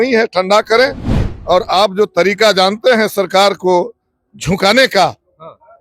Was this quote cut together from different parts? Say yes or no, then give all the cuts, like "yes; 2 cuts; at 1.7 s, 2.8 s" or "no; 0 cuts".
yes; 1 cut; at 1.1 s